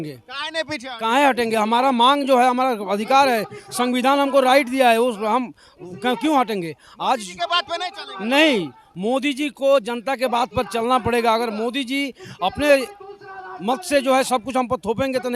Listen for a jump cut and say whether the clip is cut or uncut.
uncut